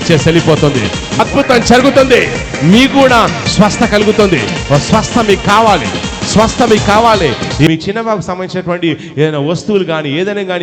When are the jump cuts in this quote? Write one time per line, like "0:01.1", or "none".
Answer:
0:01.2
0:07.7